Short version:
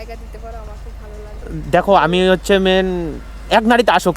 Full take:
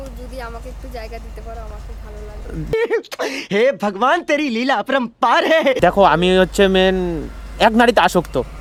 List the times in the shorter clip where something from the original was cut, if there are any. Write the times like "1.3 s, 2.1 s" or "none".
1.7 s